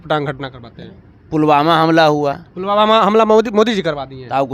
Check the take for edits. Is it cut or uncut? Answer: uncut